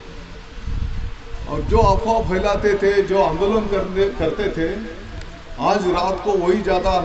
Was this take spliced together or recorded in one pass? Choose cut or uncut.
uncut